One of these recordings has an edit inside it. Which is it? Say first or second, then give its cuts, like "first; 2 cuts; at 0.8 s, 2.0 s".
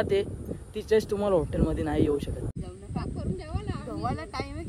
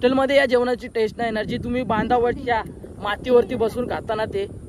first; 1 cut; at 2.5 s